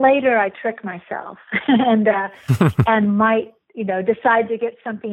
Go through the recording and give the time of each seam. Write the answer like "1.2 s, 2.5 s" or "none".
none